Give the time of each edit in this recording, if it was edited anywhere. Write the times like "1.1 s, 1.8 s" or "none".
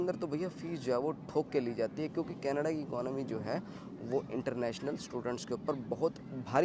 none